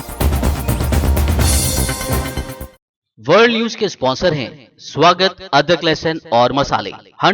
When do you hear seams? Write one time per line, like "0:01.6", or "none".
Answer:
0:02.7

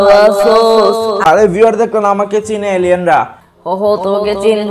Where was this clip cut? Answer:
none

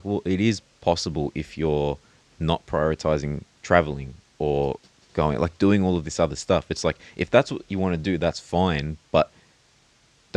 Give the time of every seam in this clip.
none

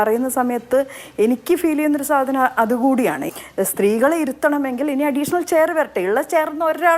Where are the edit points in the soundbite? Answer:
0:03.3

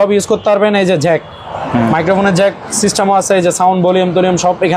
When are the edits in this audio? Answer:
none

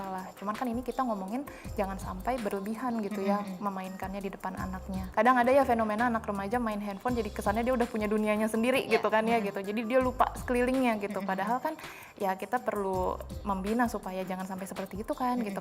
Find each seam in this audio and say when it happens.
0:05.0

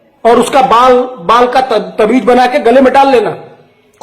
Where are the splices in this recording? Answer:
none

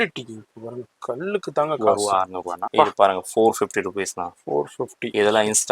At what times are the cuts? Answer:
0:02.6

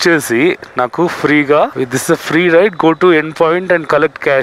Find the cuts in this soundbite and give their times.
0:01.7

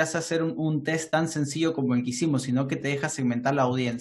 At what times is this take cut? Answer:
none

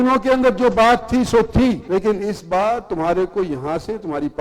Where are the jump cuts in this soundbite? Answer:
0:01.8

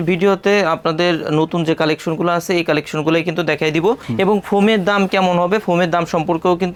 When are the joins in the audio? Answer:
none

